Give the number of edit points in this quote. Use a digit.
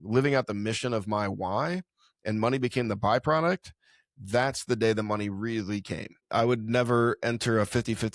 1